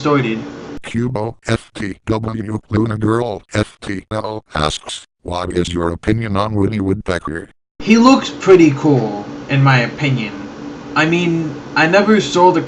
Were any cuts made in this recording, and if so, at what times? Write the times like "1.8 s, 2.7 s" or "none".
7.5 s